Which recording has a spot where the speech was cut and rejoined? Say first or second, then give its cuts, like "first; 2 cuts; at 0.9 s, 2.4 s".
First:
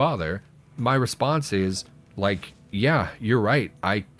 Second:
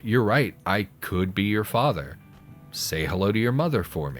first; 1 cut; at 2.3 s